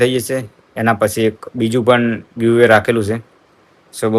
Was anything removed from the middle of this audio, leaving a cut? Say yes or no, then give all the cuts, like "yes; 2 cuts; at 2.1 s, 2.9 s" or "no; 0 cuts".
no; 0 cuts